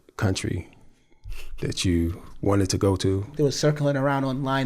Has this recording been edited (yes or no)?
yes